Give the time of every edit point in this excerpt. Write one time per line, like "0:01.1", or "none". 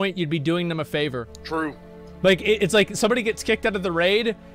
0:01.3